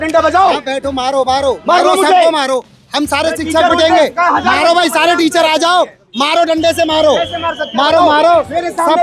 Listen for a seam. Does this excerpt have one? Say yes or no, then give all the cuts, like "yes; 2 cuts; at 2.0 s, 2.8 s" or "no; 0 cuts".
no; 0 cuts